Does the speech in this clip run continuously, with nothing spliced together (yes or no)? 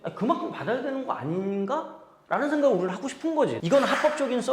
no